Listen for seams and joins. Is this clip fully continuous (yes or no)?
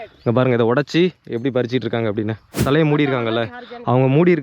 no